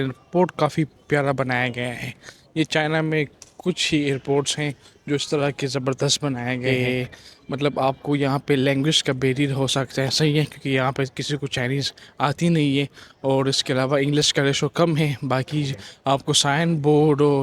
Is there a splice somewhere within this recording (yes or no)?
yes